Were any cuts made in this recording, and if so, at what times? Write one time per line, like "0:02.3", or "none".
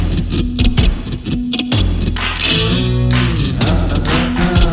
none